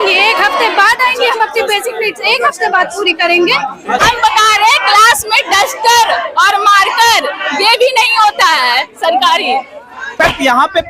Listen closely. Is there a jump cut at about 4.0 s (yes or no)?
yes